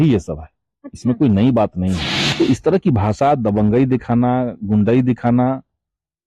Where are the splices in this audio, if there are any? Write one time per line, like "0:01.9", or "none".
0:02.1